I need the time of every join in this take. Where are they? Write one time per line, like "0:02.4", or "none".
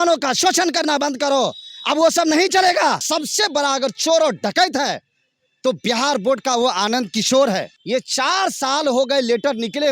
0:03.0
0:07.7